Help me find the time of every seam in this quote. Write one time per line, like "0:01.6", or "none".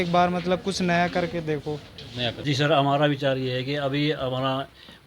0:02.4